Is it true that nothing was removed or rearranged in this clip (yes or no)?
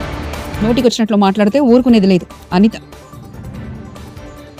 yes